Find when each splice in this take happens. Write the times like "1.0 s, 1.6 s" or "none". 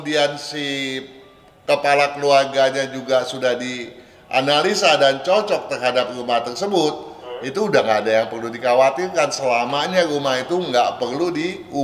none